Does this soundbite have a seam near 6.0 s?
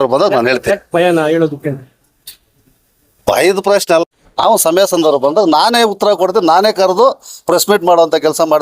no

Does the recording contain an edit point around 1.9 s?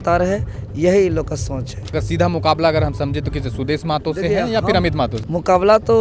yes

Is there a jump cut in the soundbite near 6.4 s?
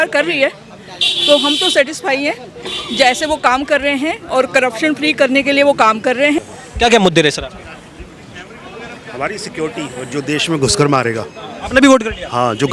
yes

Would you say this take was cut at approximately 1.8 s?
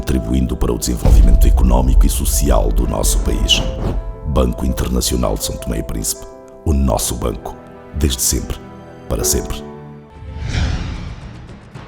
no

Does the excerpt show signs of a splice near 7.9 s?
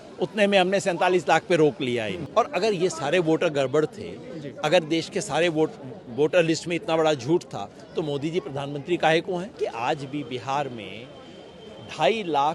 no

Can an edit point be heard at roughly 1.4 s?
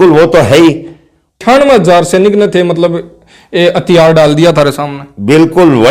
yes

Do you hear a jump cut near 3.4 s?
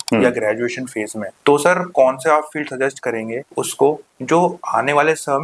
yes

